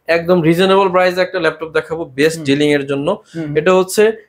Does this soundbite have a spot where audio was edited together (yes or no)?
no